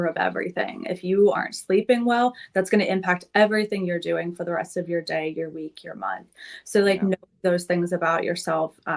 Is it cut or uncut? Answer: uncut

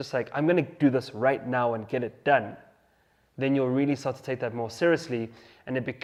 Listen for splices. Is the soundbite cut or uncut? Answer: uncut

